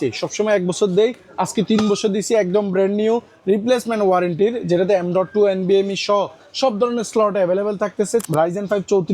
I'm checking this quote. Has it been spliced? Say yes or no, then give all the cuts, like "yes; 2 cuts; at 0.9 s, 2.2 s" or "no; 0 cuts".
yes; 1 cut; at 8.2 s